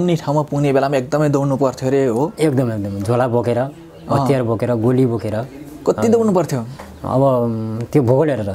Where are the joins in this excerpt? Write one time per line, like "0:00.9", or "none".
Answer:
none

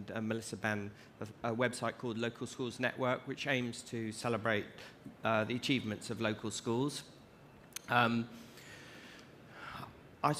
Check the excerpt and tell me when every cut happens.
0:08.5

